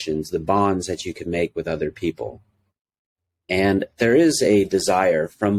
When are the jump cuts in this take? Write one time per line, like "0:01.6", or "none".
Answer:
none